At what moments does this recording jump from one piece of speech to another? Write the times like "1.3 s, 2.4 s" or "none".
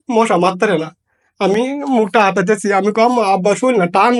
none